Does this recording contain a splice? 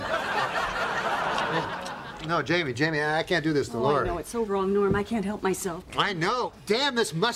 yes; 1 cut; at 6.1 s

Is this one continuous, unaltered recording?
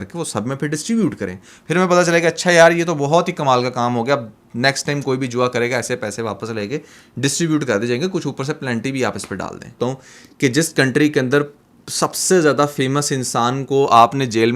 no; 1 cut; at 9.8 s

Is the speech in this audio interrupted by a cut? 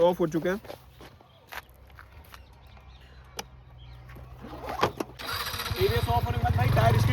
yes; 1 cut; at 5.2 s

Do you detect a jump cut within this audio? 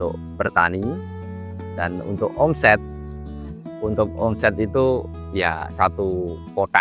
no; 0 cuts

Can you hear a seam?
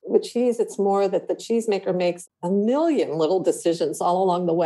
no; 0 cuts

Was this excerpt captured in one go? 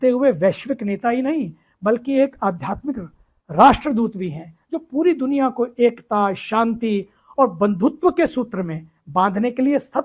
yes; 0 cuts

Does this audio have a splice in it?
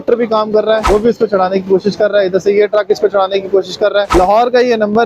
yes; 2 cuts; at 0.8 s, 4.1 s

